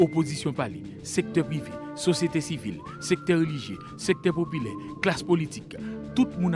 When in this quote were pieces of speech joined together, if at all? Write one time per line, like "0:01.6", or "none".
none